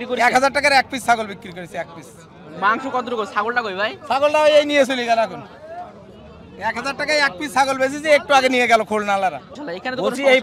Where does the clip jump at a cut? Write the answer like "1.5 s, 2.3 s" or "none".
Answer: 9.4 s